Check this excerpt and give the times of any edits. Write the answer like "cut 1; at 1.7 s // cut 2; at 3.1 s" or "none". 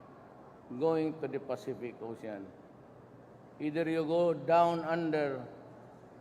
cut 1; at 2.4 s